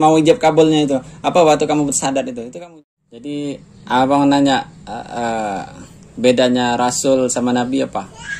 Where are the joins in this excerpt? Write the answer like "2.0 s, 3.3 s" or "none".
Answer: 2.5 s